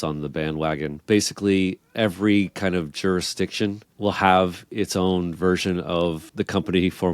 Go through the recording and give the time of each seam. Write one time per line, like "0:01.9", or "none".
0:01.0
0:03.9